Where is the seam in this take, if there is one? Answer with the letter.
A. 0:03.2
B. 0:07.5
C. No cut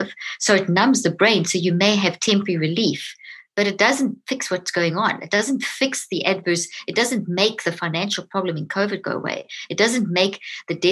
C